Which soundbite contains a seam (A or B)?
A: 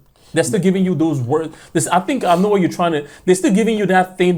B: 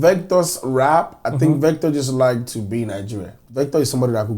B